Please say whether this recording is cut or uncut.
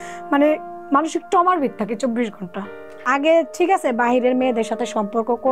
cut